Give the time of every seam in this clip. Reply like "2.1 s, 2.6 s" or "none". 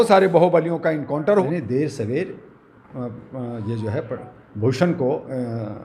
1.4 s